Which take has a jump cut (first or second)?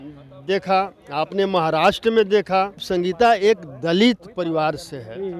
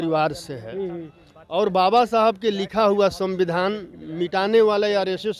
first